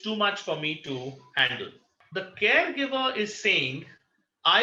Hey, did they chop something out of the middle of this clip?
yes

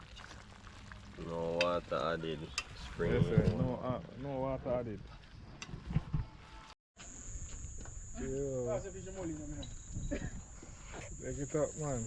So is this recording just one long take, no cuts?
no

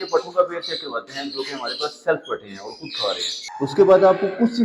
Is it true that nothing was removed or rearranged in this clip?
no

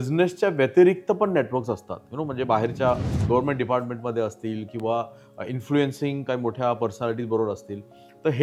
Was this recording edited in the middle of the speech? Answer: no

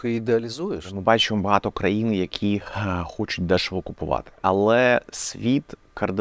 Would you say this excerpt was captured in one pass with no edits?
no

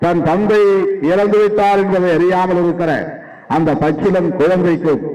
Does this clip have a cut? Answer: no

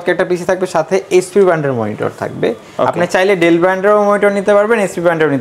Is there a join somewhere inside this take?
yes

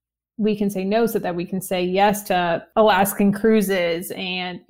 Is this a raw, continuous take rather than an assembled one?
yes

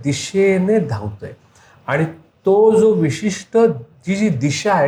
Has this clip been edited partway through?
no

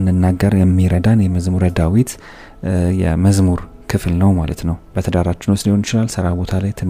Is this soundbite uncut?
no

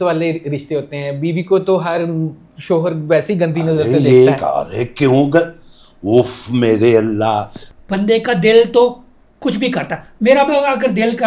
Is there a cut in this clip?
yes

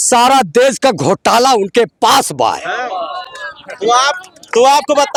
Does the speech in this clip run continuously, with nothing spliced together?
yes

